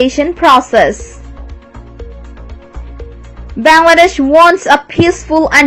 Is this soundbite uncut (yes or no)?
yes